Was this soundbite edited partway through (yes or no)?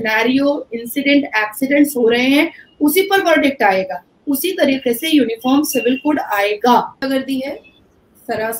yes